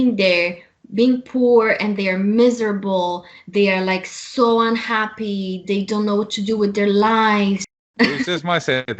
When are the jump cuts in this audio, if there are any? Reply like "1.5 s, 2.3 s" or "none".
7.7 s